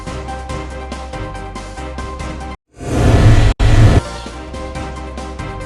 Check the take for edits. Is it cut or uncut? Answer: cut